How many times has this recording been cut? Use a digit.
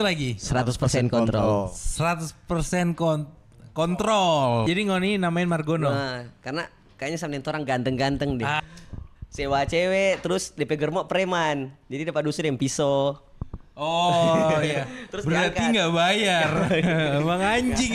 2